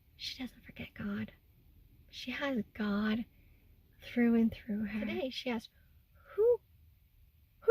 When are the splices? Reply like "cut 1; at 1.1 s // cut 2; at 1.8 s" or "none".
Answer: cut 1; at 5.1 s